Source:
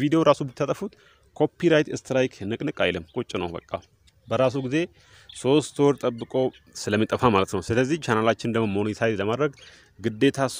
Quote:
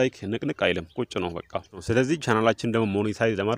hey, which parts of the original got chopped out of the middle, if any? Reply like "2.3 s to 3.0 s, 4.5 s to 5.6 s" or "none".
4.0 s to 7.6 s